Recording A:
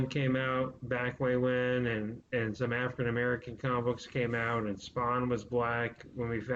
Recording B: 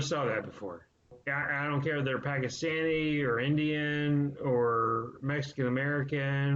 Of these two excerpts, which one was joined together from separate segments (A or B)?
B